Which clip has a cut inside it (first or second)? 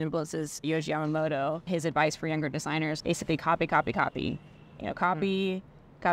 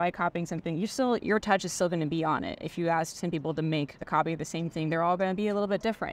first